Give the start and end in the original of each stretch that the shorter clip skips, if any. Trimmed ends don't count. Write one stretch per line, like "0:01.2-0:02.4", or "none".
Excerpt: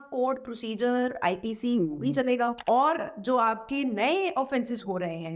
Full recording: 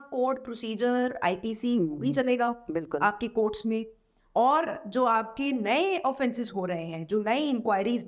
0:02.6-0:04.3